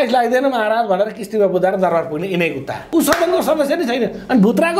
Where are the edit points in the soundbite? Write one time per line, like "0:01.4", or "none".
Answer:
0:02.8